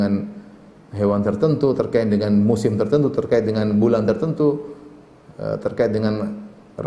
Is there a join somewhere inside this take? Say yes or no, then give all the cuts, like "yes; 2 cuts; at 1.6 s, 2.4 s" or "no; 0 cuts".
no; 0 cuts